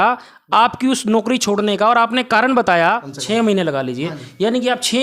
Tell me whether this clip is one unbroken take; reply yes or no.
no